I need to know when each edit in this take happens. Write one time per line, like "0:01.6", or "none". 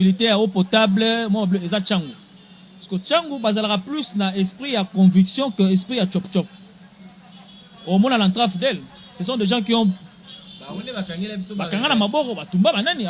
none